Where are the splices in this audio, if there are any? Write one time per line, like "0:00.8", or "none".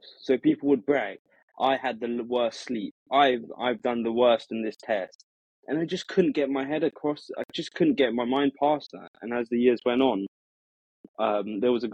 none